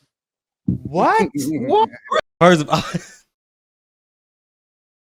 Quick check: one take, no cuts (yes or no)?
yes